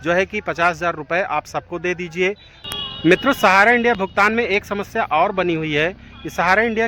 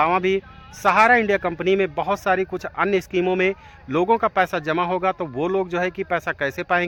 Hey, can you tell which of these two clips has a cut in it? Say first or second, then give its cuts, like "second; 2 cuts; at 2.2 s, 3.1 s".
first; 1 cut; at 2.6 s